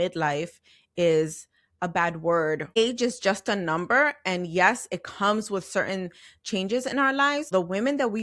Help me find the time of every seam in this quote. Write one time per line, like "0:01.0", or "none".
0:02.8
0:07.5